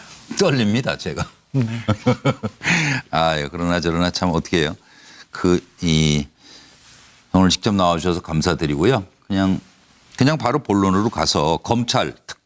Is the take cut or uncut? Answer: uncut